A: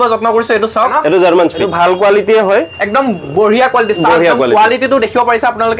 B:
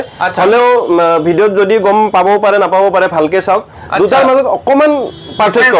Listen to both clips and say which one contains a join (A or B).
A